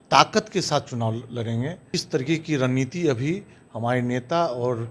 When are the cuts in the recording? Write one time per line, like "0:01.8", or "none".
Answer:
0:01.9